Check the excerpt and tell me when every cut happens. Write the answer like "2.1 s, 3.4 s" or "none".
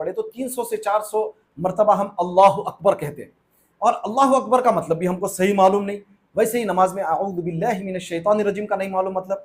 none